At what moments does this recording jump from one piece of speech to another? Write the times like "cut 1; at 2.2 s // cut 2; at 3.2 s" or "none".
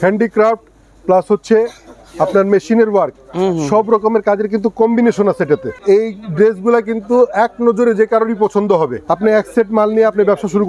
cut 1; at 5.8 s // cut 2; at 9.0 s